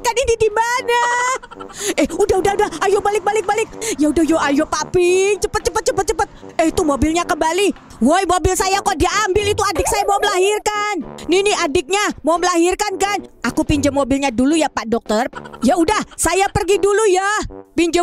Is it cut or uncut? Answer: cut